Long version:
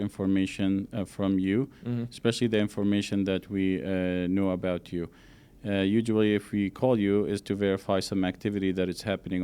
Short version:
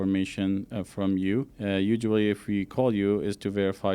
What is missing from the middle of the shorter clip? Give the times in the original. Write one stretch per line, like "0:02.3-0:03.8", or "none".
0:01.7-0:05.6